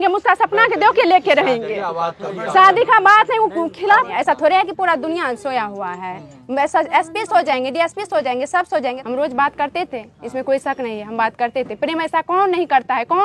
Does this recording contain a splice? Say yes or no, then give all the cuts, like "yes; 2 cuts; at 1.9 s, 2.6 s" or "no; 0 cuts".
yes; 2 cuts; at 4.1 s, 9.0 s